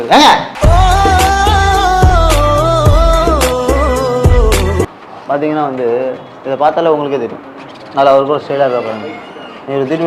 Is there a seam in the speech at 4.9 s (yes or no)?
yes